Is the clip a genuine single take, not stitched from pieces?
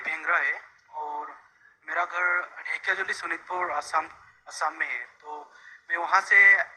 yes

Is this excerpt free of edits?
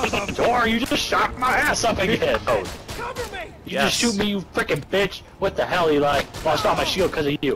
no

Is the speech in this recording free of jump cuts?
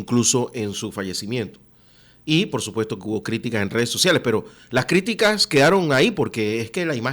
yes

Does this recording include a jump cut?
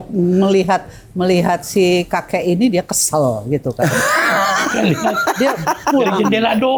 no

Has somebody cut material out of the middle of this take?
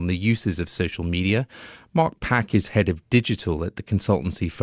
no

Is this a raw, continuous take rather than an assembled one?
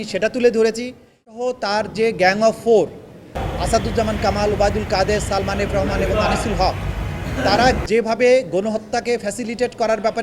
no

